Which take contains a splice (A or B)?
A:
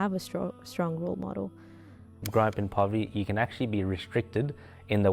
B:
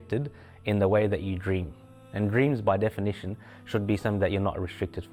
A